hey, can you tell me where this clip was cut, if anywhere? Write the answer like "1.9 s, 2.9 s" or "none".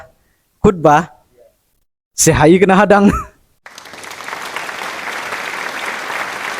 3.9 s